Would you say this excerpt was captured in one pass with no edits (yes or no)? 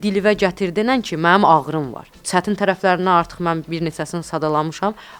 no